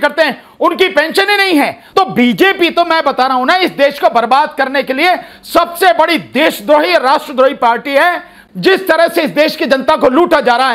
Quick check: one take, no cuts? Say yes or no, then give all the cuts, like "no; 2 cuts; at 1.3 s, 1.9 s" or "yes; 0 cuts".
no; 2 cuts; at 1.8 s, 8.4 s